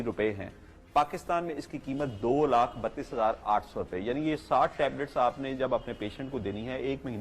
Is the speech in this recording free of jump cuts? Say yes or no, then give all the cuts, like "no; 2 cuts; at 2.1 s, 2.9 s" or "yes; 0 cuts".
yes; 0 cuts